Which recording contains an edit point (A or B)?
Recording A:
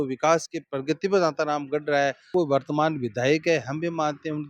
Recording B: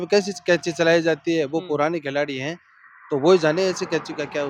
A